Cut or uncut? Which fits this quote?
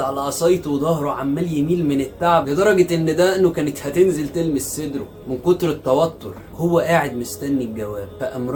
uncut